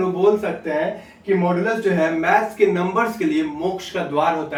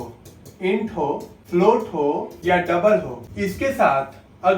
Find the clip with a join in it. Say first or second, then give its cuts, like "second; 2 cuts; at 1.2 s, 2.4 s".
second; 3 cuts; at 1.3 s, 2.3 s, 3.2 s